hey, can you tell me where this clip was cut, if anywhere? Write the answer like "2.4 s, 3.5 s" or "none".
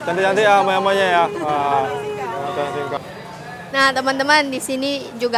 3.0 s